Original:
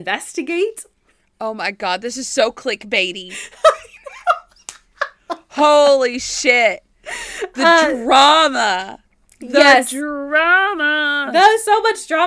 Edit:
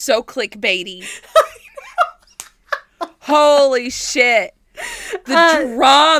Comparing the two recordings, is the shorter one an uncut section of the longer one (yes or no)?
yes